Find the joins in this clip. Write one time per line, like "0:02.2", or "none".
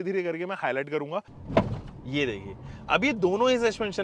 0:01.4